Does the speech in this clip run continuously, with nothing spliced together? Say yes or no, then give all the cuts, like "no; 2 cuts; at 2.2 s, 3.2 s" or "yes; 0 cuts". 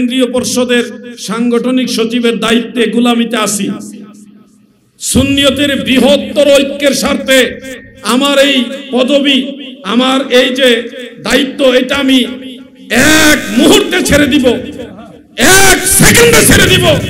yes; 0 cuts